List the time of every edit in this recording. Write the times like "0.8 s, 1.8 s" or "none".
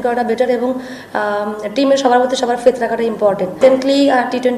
3.6 s